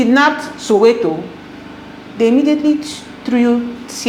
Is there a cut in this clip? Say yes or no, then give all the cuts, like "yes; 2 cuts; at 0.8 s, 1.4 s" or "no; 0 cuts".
no; 0 cuts